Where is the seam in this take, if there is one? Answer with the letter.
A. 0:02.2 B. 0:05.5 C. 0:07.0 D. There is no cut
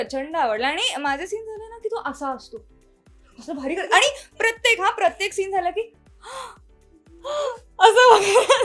D